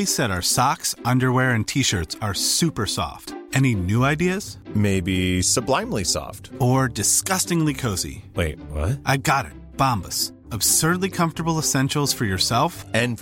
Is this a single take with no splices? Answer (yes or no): yes